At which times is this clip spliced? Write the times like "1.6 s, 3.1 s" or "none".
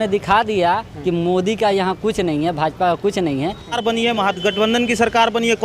3.8 s